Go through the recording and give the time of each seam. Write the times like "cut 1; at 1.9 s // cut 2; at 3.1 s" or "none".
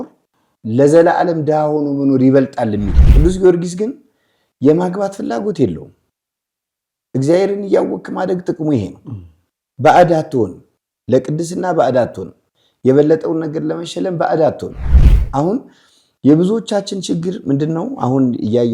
cut 1; at 3.0 s

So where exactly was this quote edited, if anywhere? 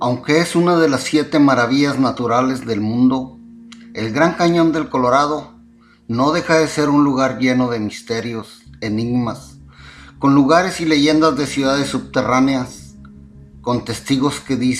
none

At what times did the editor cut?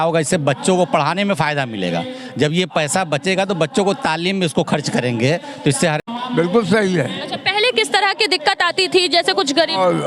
cut 1; at 6.0 s

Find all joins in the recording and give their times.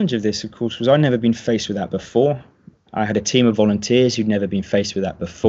none

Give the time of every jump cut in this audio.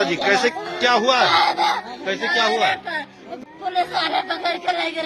cut 1; at 3.3 s

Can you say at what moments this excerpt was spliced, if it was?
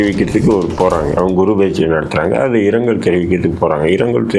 cut 1; at 1.1 s

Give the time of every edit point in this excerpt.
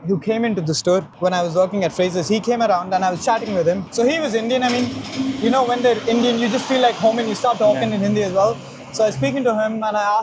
none

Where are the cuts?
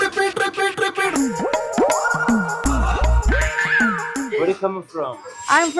cut 1; at 1.1 s

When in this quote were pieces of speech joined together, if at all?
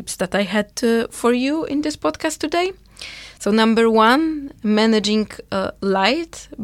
none

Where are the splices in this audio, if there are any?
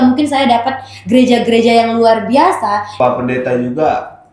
cut 1; at 2.9 s

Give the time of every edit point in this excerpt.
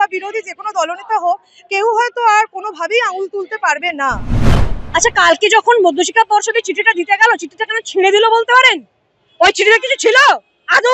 cut 1; at 4.3 s

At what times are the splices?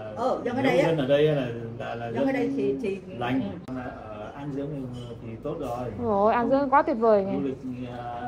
cut 1; at 3.7 s

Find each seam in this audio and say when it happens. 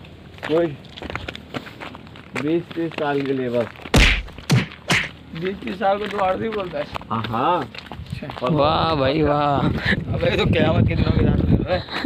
none

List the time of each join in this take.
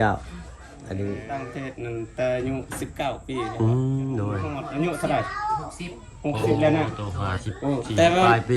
cut 1; at 1.5 s // cut 2; at 4.5 s

